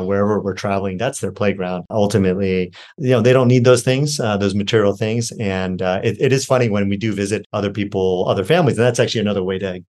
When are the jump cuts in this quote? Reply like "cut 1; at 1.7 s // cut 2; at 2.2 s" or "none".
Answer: cut 1; at 1.9 s // cut 2; at 7.5 s